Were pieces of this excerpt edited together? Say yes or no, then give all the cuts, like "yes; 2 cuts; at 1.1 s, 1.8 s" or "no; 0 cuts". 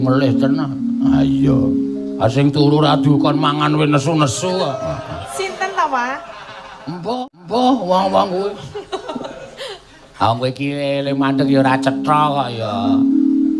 no; 0 cuts